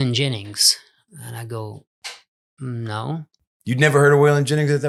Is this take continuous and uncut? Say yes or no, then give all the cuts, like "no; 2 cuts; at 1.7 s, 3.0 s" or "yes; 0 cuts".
yes; 0 cuts